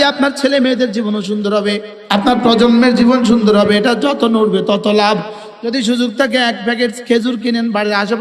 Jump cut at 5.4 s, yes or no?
yes